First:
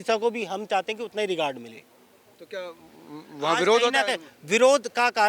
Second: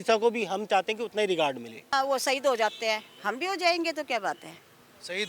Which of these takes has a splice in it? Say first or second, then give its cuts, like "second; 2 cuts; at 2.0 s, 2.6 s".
second; 1 cut; at 1.9 s